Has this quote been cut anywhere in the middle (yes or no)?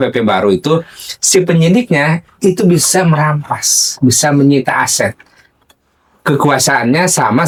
no